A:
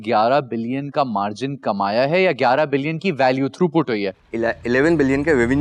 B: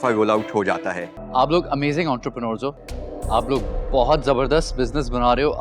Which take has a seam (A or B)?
B